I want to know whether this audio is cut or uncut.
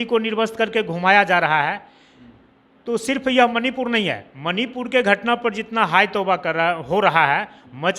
uncut